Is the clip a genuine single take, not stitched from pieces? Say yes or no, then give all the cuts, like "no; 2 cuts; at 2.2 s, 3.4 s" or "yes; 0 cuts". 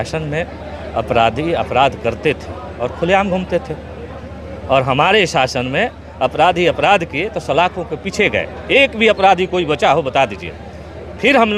yes; 0 cuts